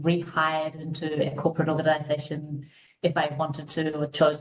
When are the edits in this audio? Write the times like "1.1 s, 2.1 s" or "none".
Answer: none